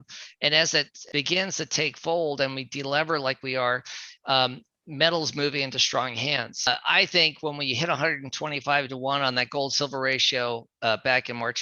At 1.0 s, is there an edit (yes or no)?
yes